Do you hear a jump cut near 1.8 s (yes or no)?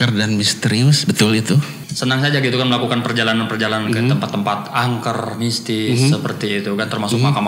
yes